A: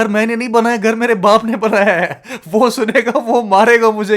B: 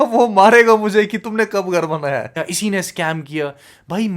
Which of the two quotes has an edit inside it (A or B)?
B